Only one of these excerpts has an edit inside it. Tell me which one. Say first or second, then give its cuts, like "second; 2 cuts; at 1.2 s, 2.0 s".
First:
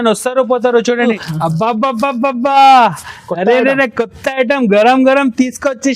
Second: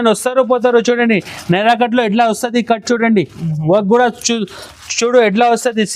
first; 1 cut; at 1.2 s